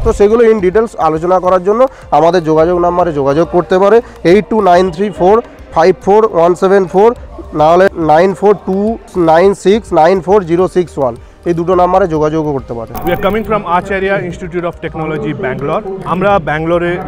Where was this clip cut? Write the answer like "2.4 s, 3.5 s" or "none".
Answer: 7.9 s, 9.0 s, 12.9 s, 16.0 s